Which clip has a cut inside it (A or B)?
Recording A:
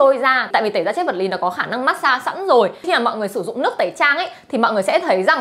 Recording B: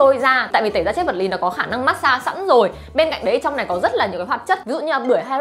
A